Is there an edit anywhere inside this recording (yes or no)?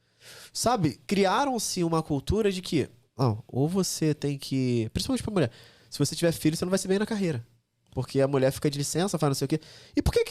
yes